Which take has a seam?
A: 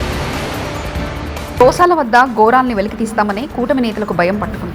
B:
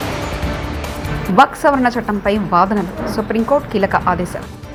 A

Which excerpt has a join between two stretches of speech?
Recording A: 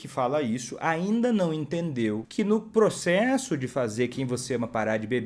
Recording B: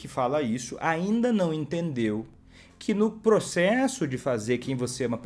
A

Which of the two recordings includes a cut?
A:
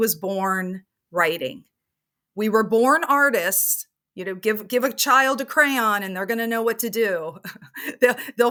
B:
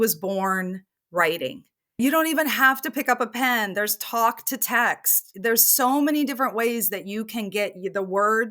B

